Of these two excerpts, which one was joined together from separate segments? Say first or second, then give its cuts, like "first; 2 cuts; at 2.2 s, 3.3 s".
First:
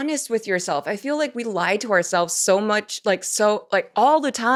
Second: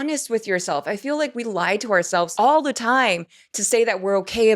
second; 1 cut; at 2.3 s